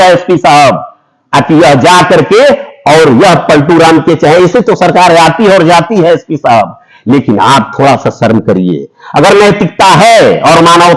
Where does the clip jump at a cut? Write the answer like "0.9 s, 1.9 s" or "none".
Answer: none